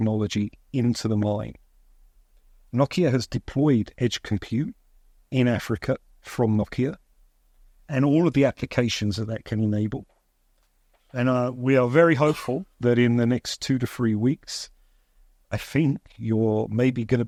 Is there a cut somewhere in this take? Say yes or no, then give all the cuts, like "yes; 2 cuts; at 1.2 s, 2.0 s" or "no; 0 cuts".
no; 0 cuts